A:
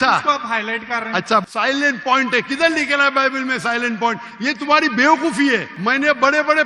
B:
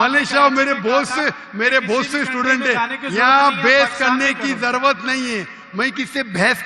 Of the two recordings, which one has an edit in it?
A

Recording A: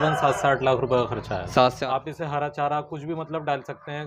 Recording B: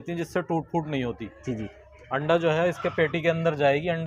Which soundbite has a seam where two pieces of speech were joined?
A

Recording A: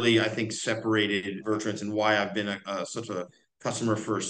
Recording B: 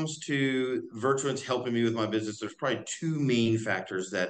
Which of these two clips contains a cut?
A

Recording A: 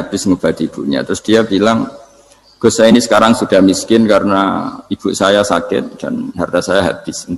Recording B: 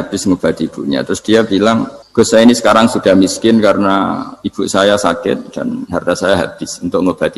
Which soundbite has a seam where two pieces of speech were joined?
B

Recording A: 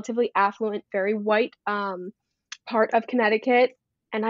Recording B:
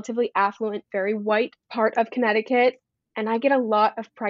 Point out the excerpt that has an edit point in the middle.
B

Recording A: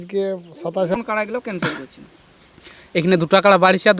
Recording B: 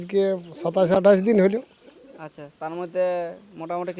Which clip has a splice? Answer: A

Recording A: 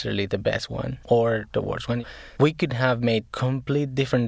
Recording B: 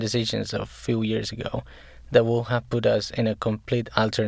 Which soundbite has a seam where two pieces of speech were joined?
A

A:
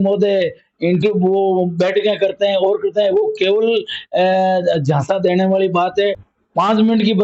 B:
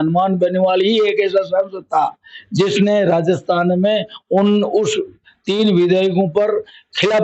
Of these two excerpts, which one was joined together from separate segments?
A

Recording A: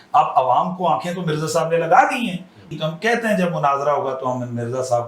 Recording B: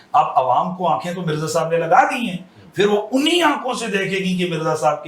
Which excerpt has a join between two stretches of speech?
A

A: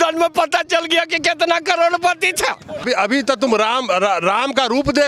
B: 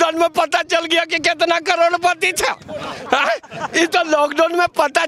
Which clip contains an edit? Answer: A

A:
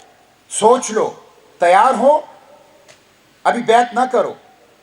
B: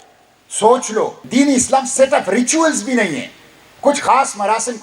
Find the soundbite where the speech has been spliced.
B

